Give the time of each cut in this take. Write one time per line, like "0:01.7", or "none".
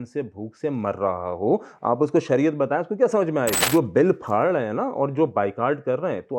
0:03.6